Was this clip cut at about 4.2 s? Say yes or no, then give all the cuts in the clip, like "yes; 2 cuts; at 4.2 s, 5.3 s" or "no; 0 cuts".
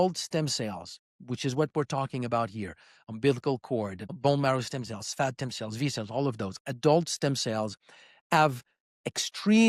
yes; 1 cut; at 4.2 s